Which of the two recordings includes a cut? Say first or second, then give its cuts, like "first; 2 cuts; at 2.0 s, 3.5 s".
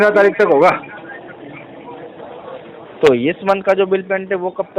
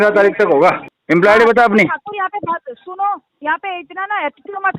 second; 1 cut; at 0.9 s